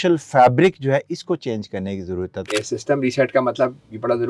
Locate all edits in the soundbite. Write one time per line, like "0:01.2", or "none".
0:02.5

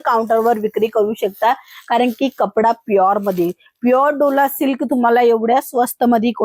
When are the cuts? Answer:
none

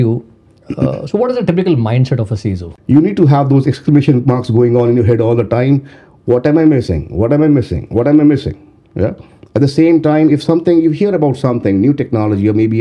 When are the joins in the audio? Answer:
0:02.7

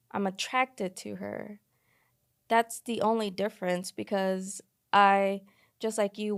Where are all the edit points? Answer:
none

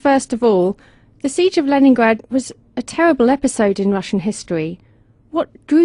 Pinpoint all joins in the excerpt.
0:03.3

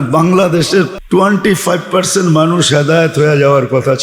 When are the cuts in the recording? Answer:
0:01.0

